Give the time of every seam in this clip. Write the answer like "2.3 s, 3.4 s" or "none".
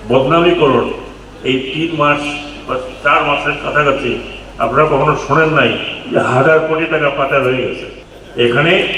none